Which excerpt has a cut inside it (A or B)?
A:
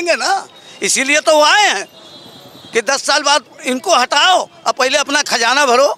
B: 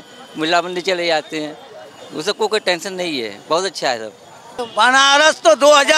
B